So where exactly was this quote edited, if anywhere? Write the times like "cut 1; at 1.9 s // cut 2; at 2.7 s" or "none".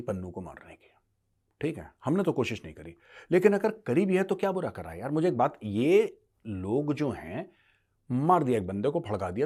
none